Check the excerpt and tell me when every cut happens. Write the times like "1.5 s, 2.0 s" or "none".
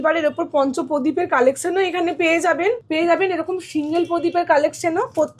2.8 s